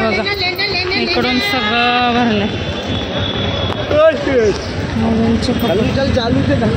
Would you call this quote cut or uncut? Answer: uncut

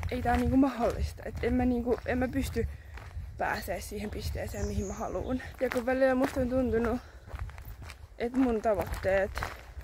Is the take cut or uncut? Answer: uncut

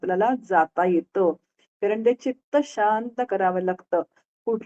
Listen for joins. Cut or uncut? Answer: cut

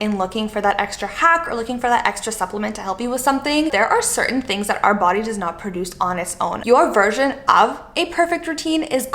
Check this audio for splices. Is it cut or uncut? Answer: cut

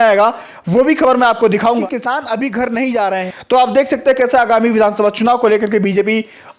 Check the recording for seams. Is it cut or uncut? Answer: cut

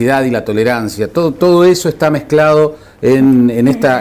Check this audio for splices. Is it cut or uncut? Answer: uncut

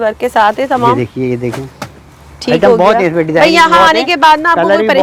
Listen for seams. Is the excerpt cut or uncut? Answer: uncut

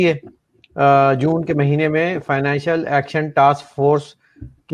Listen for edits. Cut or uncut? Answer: uncut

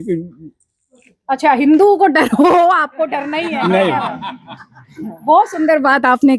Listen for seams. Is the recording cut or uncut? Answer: uncut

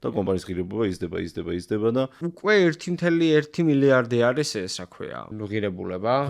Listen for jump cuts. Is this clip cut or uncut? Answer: cut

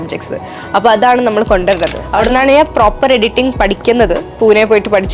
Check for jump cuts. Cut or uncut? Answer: cut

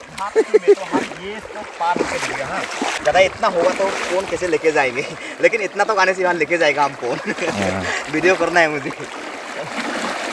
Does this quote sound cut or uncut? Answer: cut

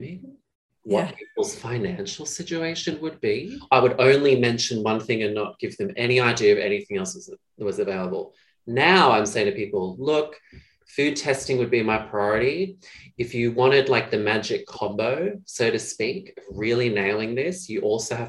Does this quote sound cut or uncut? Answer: cut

